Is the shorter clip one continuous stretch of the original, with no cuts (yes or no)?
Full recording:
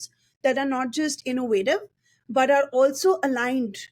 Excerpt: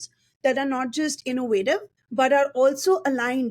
no